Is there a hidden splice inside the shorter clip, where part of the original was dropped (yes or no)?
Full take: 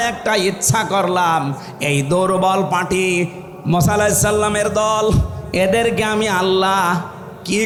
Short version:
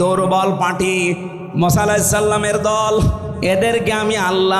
no